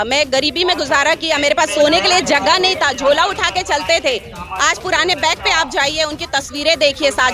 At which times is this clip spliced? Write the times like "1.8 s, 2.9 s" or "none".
none